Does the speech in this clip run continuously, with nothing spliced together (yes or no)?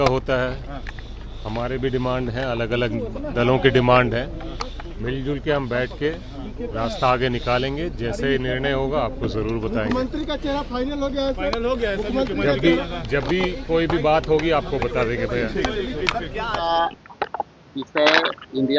yes